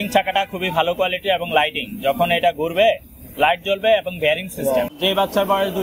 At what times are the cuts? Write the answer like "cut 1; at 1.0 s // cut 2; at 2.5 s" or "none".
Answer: cut 1; at 4.9 s